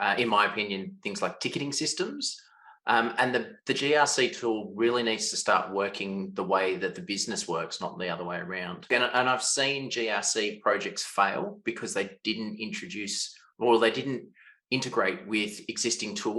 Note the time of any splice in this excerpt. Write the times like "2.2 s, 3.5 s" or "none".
8.9 s